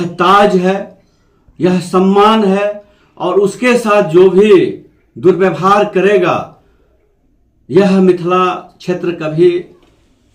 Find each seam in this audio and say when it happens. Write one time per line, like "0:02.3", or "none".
none